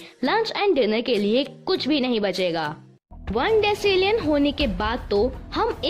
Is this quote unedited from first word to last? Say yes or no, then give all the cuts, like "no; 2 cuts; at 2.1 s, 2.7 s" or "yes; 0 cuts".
no; 1 cut; at 3.2 s